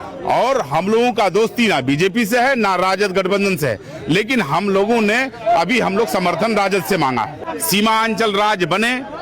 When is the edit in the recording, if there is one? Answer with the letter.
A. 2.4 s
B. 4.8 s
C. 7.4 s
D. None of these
C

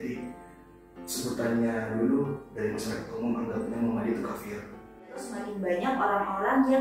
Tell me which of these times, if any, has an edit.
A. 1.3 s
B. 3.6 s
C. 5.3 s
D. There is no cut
C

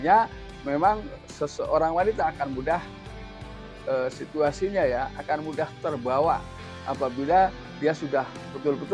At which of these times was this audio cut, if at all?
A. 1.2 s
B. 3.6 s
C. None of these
A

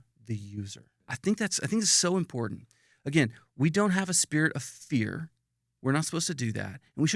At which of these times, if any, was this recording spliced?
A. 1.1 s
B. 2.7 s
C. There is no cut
A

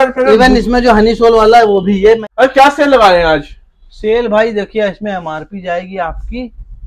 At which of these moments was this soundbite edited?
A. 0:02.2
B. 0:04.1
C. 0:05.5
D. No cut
A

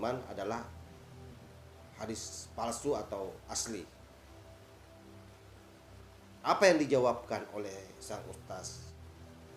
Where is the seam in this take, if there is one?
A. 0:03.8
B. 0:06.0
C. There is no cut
C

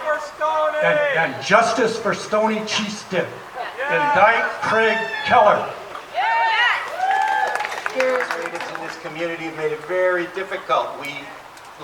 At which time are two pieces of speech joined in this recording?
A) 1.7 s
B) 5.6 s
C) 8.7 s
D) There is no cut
C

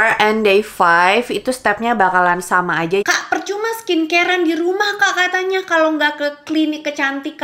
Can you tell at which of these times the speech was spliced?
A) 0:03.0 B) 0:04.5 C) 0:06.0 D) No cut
A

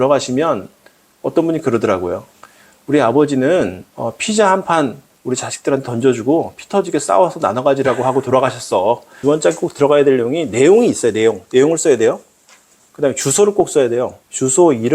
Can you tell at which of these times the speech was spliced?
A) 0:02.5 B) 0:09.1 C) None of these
B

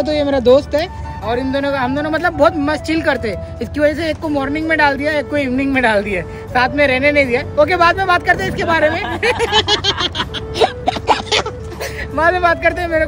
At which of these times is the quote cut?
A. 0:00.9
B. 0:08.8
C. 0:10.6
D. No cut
D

